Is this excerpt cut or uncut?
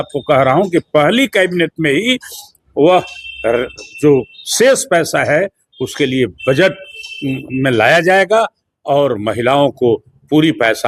uncut